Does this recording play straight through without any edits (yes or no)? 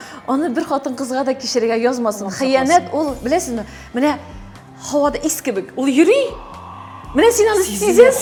yes